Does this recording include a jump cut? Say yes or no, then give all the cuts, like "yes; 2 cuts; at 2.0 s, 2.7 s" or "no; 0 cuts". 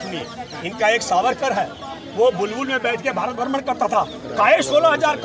no; 0 cuts